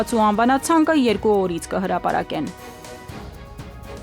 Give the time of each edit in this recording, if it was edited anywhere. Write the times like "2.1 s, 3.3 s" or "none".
3.0 s